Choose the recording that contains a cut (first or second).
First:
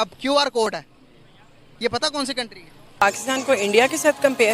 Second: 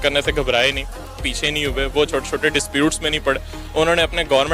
first